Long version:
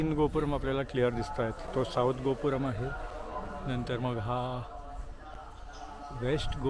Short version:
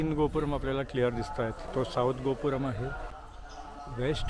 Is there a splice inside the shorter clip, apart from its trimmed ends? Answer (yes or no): yes